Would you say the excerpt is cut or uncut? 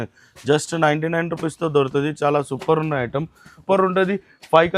cut